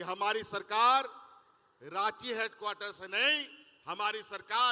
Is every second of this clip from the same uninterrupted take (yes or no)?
yes